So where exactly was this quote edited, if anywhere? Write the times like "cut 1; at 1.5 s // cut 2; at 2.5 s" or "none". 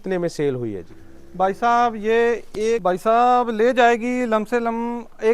cut 1; at 2.8 s